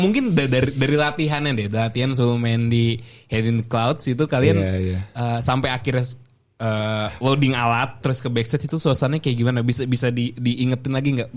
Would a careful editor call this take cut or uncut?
uncut